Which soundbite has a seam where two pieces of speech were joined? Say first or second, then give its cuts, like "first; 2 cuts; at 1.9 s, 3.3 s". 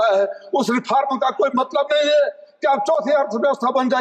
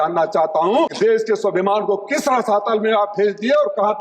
second; 1 cut; at 0.9 s